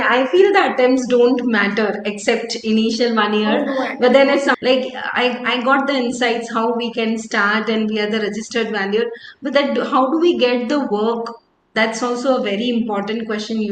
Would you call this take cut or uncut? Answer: cut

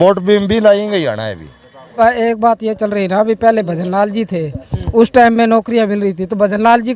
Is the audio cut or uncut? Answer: cut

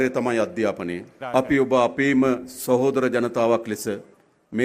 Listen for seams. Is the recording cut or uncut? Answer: cut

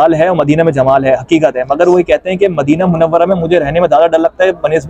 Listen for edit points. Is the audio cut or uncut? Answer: uncut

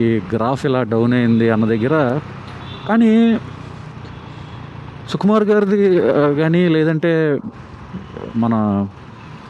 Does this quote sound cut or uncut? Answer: uncut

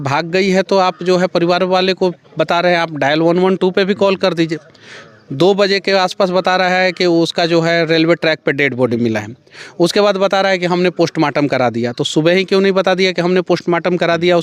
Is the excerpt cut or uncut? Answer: uncut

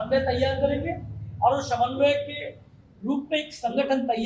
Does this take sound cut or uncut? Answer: uncut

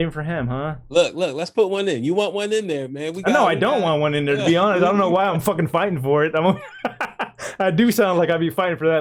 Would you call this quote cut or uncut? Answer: uncut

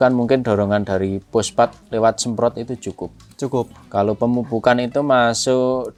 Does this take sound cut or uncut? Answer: uncut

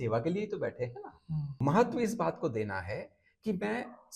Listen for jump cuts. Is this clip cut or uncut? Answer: cut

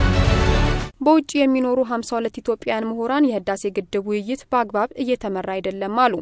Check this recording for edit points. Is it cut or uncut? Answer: uncut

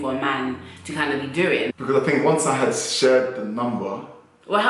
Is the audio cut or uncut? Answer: cut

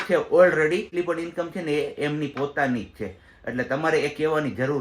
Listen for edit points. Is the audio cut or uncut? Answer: cut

